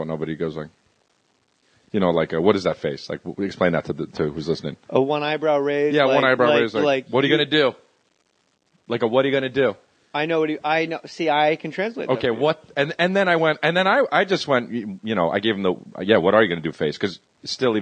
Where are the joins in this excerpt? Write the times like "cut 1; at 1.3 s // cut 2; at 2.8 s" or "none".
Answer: none